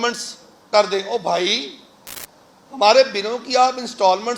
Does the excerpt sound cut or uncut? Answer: uncut